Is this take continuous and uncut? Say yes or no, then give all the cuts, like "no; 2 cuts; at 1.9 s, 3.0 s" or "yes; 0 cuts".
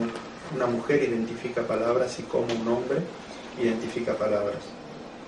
no; 1 cut; at 2.8 s